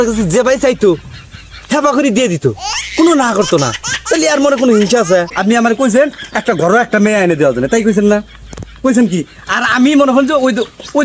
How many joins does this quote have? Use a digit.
1